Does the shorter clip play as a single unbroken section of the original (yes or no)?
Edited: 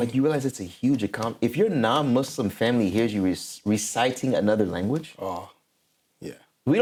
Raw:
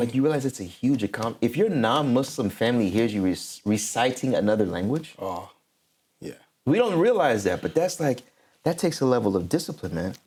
yes